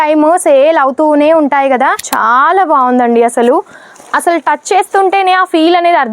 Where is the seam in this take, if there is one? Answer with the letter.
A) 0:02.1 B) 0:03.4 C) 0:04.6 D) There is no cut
A